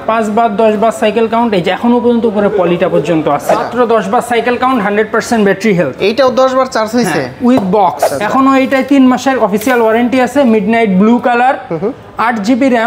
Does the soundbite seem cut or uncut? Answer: cut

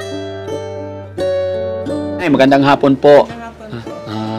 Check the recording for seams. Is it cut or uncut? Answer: cut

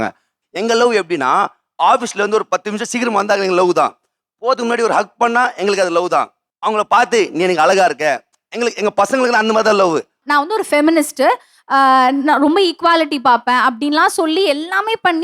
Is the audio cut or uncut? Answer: cut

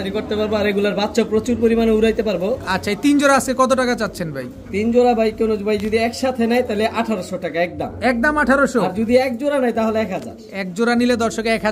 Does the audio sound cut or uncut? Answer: uncut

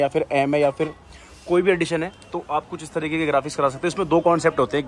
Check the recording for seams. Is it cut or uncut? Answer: uncut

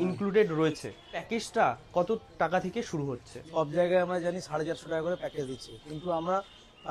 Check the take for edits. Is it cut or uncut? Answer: cut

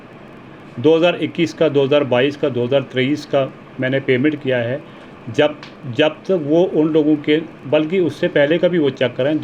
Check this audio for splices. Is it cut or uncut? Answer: uncut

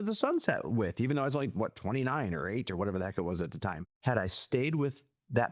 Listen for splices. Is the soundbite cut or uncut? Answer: cut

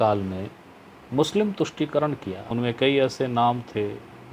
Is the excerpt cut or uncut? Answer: cut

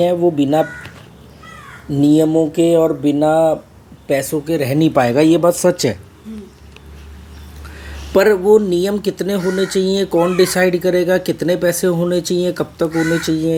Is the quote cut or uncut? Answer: uncut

